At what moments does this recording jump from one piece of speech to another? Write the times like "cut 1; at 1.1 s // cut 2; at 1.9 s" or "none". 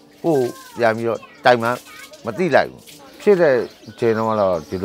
cut 1; at 3.0 s